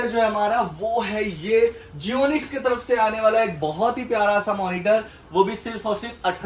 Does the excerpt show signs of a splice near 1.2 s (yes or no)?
no